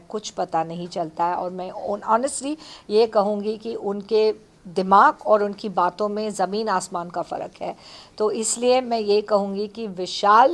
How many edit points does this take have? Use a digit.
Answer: 0